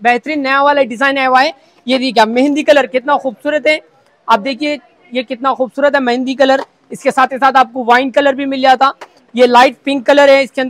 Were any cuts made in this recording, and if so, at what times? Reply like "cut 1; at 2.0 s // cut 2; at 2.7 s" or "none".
none

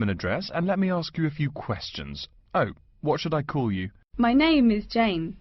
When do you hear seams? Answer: cut 1; at 4.0 s

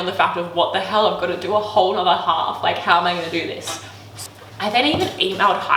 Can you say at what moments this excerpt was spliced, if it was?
cut 1; at 4.1 s

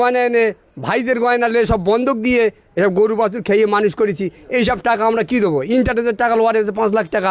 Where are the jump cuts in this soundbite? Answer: none

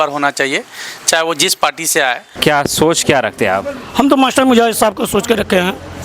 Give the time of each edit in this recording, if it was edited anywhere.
cut 1; at 2.3 s

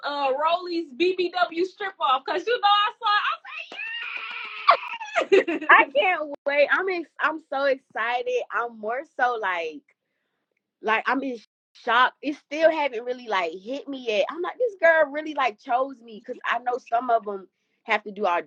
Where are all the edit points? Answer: none

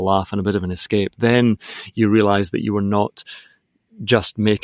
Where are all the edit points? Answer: none

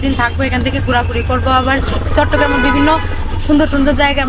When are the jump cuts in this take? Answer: none

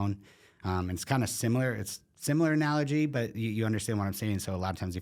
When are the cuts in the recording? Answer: none

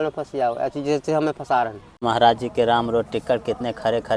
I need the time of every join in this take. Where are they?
cut 1; at 2.0 s

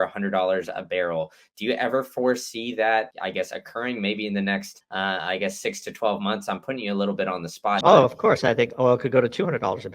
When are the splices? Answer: cut 1; at 3.1 s // cut 2; at 4.8 s // cut 3; at 7.8 s

